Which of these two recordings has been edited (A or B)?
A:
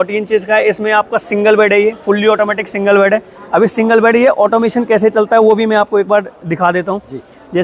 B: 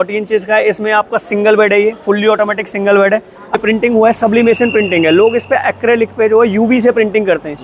B